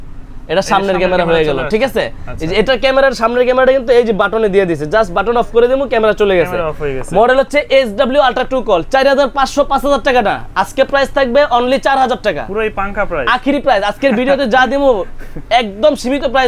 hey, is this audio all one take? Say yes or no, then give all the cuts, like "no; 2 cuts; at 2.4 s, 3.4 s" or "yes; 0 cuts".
yes; 0 cuts